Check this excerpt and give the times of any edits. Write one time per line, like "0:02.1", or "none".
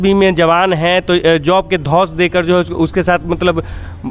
none